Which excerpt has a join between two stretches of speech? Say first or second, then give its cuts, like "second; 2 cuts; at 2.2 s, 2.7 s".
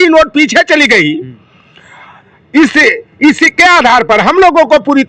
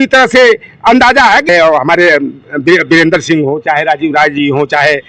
second; 1 cut; at 1.5 s